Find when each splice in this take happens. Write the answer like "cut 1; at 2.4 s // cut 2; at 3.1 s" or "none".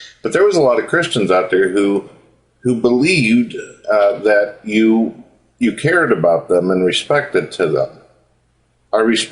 cut 1; at 7.7 s